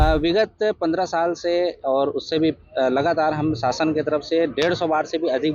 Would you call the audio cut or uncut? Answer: uncut